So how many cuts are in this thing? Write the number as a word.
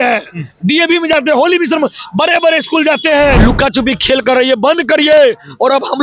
one